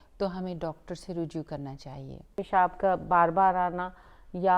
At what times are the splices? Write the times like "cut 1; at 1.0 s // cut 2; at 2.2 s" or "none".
cut 1; at 2.4 s